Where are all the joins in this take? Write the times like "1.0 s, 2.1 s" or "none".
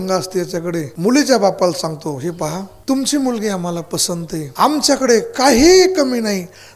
0.9 s, 2.7 s, 4.5 s